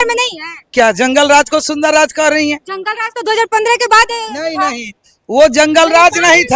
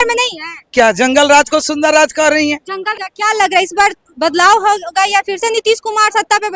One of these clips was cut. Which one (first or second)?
second